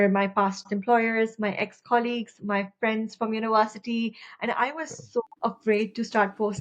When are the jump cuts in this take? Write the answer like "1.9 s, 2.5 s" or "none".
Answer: 5.3 s